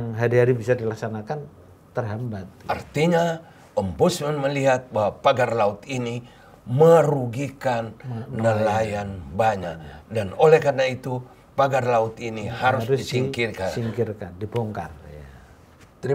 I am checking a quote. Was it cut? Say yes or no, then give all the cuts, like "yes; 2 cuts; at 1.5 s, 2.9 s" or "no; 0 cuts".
no; 0 cuts